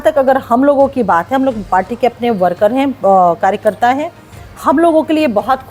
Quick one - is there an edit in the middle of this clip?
no; 0 cuts

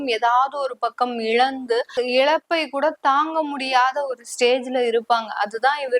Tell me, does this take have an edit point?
yes; 1 cut; at 1.9 s

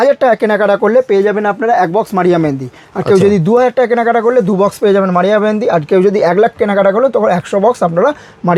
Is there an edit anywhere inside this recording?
no; 0 cuts

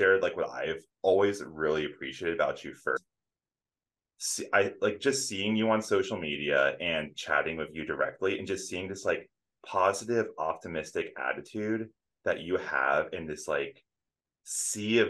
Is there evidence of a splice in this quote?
yes; 1 cut; at 3.0 s

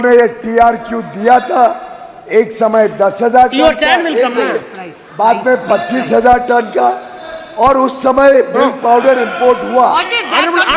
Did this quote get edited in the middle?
no; 0 cuts

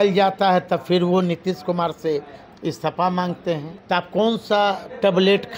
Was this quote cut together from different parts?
yes; 1 cut; at 3.7 s

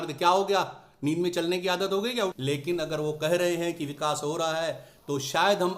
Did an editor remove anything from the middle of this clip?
yes; 1 cut; at 2.4 s

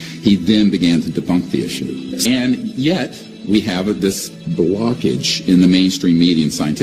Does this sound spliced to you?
no; 0 cuts

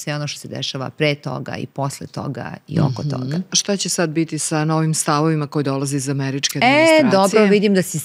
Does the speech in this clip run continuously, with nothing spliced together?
no; 2 cuts; at 3.6 s, 4.4 s

